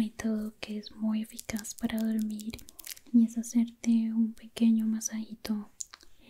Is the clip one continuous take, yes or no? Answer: yes